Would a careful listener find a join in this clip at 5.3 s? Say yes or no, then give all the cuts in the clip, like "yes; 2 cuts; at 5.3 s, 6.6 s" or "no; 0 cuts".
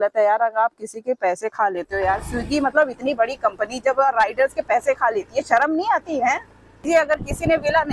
no; 1 cut; at 6.8 s